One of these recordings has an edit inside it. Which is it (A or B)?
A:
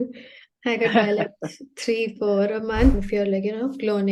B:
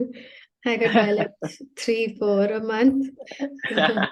A